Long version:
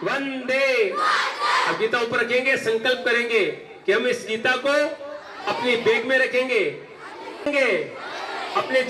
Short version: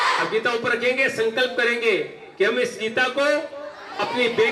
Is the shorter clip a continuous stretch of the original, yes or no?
yes